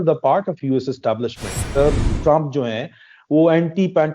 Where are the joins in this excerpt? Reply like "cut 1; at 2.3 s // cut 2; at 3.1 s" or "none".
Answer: cut 1; at 1.8 s